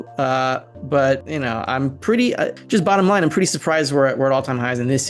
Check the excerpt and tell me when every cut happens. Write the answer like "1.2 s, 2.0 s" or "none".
1.3 s, 2.6 s